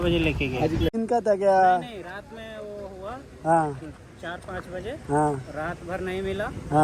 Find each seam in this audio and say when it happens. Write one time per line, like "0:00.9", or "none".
0:01.0